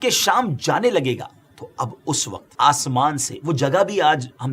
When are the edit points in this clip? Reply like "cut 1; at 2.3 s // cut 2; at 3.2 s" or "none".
cut 1; at 2.5 s